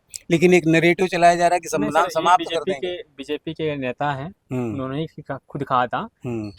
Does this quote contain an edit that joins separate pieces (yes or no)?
no